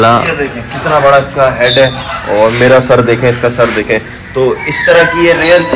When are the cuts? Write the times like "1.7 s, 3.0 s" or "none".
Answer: none